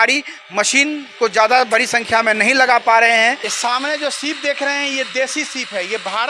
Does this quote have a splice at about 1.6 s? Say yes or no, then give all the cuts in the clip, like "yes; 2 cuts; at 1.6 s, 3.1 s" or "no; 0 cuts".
no; 1 cut; at 3.5 s